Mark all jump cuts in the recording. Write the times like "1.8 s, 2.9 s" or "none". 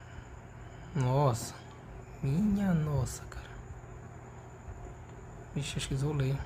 none